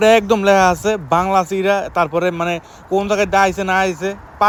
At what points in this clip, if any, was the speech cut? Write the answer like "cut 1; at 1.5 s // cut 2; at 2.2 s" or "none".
none